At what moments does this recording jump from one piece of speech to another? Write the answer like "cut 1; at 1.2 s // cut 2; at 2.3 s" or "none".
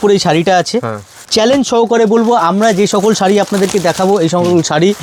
cut 1; at 1.2 s